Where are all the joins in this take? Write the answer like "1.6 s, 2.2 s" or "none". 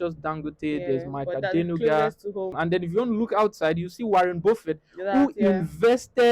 2.5 s